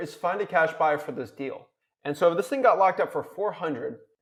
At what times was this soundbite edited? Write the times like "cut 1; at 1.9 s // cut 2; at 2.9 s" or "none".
none